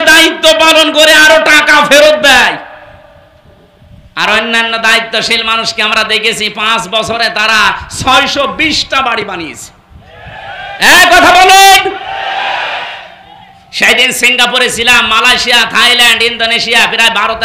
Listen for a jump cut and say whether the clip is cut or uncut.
uncut